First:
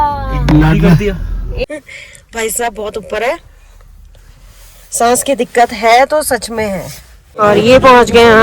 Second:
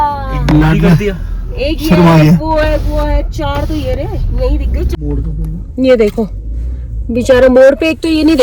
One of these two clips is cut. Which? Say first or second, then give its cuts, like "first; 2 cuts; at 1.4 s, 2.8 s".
first; 2 cuts; at 1.6 s, 7.4 s